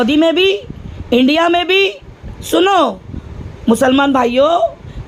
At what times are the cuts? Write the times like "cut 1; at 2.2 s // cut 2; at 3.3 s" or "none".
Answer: none